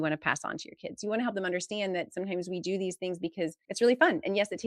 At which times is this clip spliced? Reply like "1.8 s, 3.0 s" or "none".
3.6 s